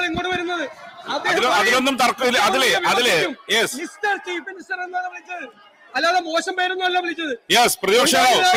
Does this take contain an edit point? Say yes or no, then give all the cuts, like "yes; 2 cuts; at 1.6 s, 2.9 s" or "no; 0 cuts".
no; 0 cuts